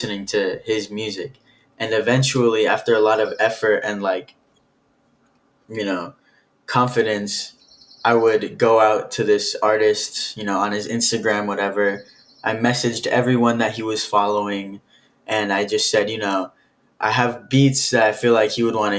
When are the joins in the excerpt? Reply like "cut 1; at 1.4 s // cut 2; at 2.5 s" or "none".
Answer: none